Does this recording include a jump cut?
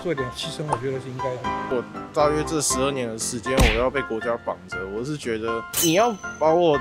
yes; 1 cut; at 1.5 s

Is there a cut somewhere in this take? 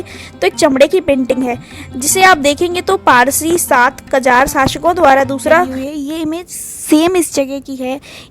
yes; 1 cut; at 5.8 s

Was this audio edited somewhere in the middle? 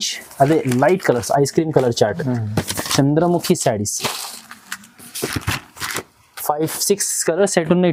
no; 0 cuts

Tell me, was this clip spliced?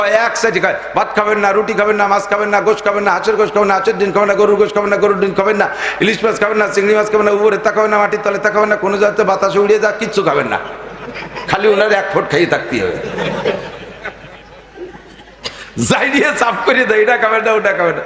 no; 0 cuts

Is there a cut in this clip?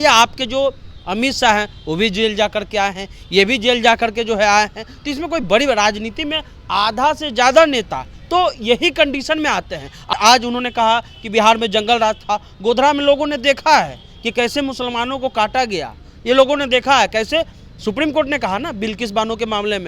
yes; 1 cut; at 10.1 s

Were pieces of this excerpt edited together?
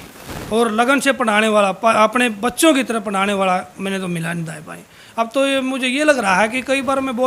no; 0 cuts

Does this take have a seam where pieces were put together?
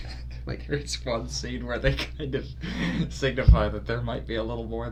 no; 0 cuts

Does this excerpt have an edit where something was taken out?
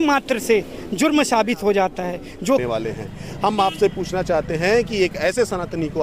yes; 1 cut; at 2.6 s

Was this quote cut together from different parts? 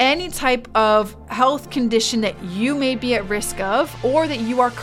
yes; 1 cut; at 1.2 s

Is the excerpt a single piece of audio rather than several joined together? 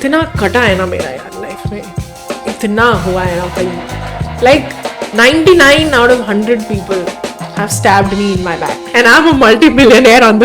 no; 1 cut; at 8.7 s

